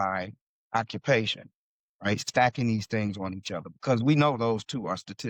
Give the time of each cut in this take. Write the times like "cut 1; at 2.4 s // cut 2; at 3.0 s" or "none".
none